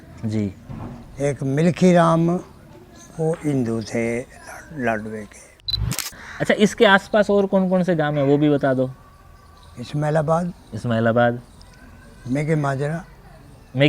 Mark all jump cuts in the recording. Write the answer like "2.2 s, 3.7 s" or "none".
5.8 s